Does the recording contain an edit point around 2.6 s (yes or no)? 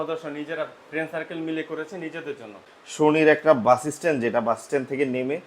yes